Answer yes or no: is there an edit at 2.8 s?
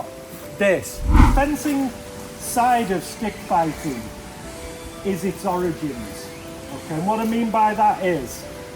no